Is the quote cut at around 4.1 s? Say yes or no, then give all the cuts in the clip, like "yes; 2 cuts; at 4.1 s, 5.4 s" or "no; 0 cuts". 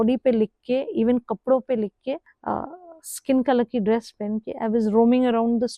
no; 1 cut; at 2.3 s